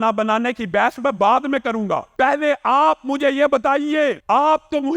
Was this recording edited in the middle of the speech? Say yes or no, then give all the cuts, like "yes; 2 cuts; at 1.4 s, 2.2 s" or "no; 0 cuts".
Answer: yes; 2 cuts; at 2.1 s, 4.2 s